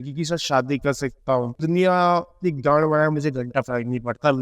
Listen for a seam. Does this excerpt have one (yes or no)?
yes